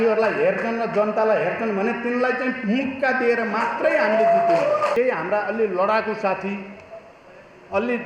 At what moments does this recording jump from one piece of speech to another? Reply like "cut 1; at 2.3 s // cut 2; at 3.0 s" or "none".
cut 1; at 4.9 s

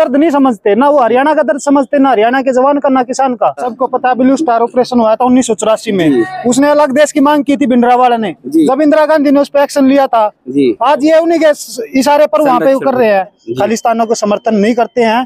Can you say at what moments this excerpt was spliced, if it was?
cut 1; at 3.7 s // cut 2; at 13.4 s

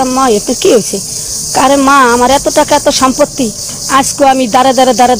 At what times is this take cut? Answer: none

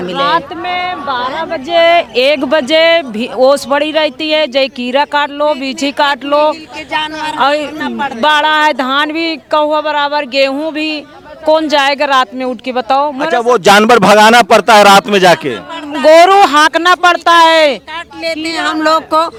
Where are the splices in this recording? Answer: none

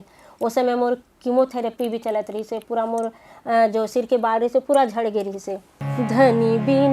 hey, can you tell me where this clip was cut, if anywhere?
cut 1; at 5.8 s

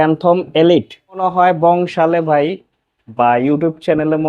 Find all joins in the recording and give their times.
cut 1; at 1.2 s

